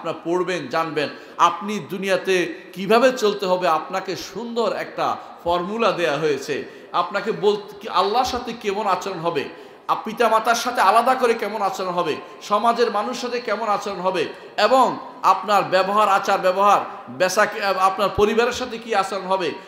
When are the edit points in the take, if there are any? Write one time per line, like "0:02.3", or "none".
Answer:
0:01.2

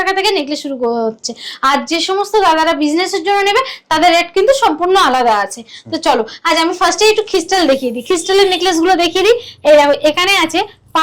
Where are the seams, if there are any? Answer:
none

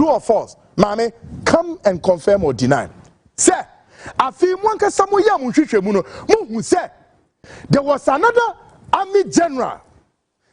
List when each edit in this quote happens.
none

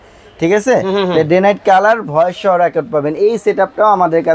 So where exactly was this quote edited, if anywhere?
none

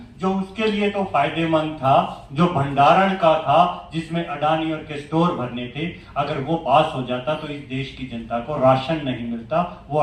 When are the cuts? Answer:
none

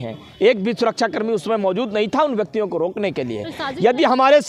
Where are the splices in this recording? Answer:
none

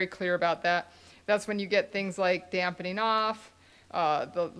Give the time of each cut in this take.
none

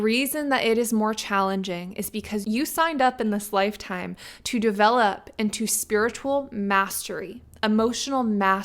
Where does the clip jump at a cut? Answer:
0:02.4

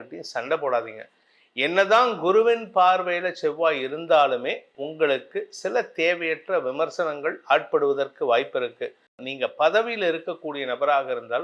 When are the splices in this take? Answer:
0:09.3

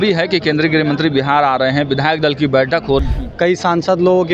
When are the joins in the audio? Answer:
0:03.0

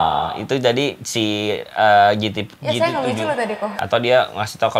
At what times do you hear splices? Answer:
0:03.8

